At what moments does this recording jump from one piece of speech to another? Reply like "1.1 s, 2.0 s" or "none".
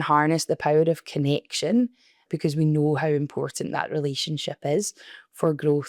2.2 s